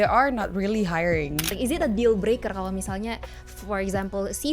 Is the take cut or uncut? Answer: cut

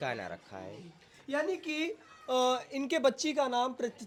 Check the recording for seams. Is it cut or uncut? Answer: uncut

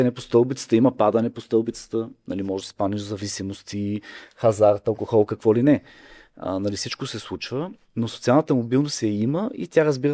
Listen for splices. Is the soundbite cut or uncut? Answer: uncut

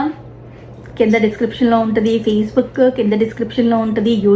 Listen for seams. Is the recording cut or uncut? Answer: uncut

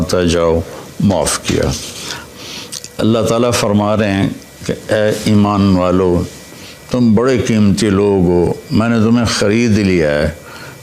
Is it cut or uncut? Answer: cut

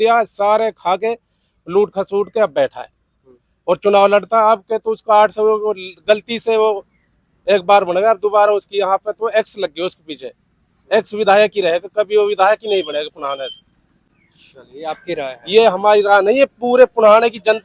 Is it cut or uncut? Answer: uncut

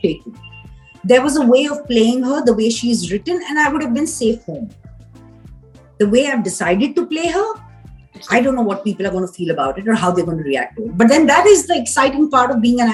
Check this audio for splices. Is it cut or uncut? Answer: uncut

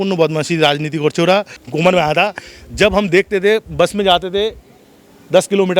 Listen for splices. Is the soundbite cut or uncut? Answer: cut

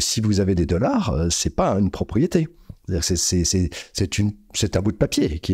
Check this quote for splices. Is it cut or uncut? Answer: uncut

